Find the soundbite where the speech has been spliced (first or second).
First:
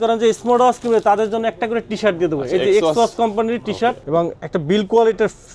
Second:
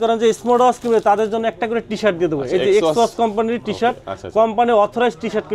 first